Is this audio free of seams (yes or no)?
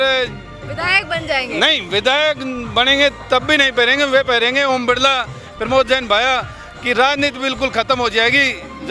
yes